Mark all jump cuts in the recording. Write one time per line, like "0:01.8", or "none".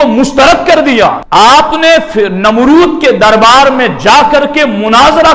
0:01.2